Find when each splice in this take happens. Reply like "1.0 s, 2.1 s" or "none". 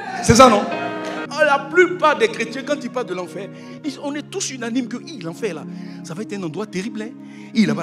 1.2 s